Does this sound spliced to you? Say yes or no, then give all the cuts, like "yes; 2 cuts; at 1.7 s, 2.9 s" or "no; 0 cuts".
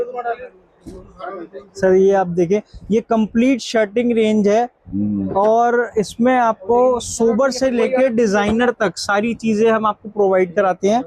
no; 0 cuts